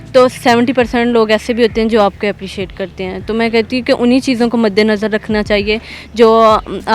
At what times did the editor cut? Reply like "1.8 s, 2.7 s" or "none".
none